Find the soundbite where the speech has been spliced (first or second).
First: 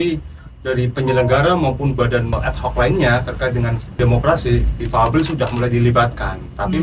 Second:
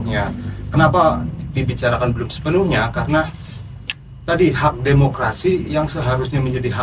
first